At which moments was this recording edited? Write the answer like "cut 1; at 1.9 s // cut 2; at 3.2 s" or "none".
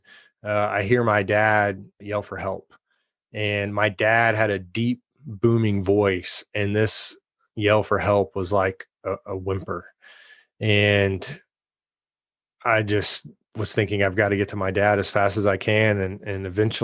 cut 1; at 2.0 s